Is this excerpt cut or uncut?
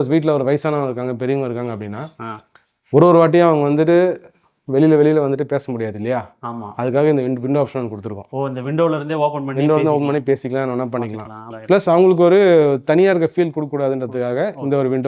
uncut